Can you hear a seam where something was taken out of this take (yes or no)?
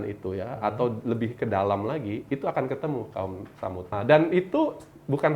yes